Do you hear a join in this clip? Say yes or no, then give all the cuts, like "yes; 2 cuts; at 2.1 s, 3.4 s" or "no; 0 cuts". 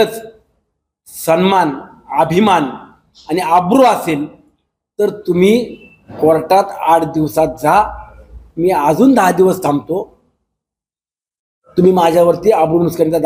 no; 0 cuts